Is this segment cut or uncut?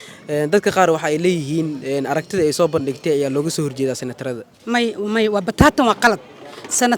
uncut